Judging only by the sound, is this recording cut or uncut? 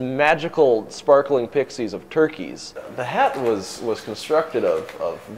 cut